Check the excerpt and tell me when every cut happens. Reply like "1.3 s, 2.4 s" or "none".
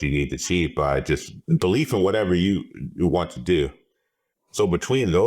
1.3 s